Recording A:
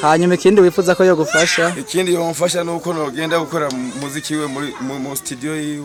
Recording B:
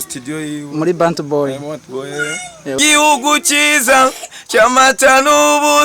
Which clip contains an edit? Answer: B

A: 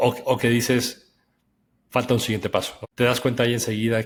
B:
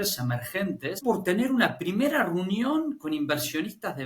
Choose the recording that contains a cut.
B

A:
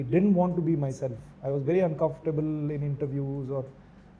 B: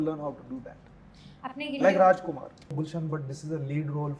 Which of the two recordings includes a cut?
B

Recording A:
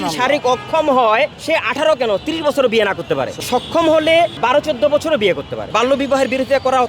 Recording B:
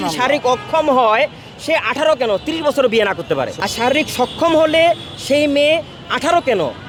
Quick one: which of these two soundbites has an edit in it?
A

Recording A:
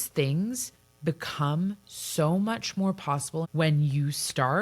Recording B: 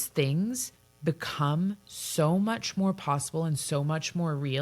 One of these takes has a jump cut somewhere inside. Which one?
A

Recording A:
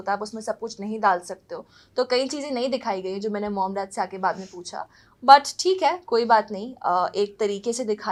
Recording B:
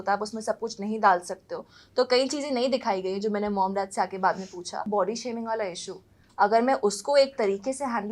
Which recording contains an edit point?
B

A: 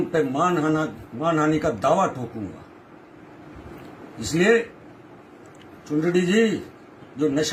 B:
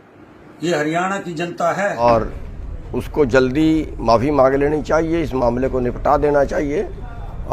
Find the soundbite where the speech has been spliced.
B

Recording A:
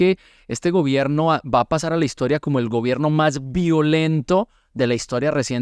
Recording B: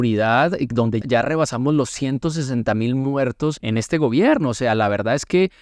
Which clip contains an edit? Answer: B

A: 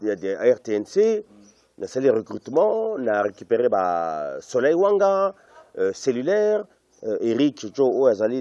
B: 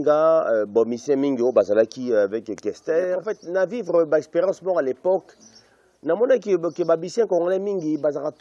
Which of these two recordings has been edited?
B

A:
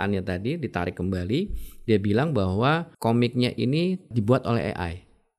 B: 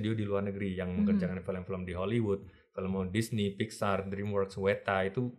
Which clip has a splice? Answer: A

